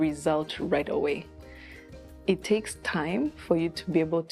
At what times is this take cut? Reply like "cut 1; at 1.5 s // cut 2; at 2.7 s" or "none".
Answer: none

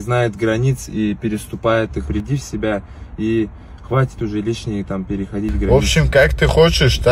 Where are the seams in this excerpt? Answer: cut 1; at 2.1 s // cut 2; at 5.7 s

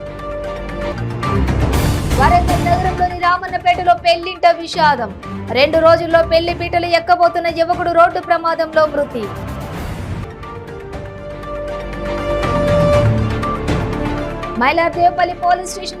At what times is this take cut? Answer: none

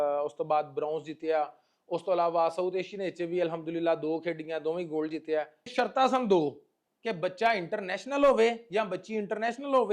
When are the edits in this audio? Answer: cut 1; at 5.7 s

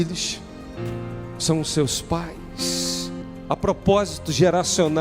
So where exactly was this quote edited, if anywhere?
cut 1; at 3.2 s

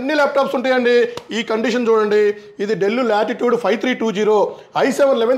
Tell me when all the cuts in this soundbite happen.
none

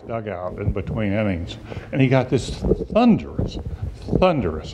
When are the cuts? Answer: cut 1; at 1.5 s

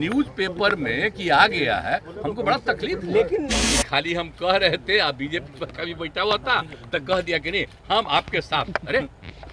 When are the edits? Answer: cut 1; at 3.5 s

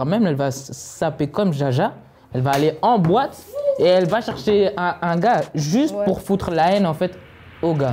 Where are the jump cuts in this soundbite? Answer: none

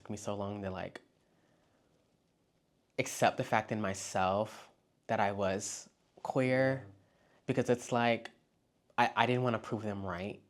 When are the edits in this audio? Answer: none

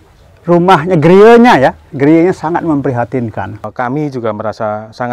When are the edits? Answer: cut 1; at 3.7 s

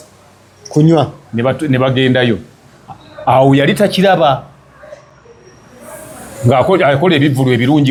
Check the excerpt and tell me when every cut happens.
none

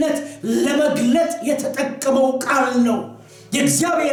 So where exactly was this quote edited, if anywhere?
none

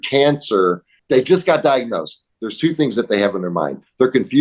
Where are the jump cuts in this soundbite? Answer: cut 1; at 0.9 s

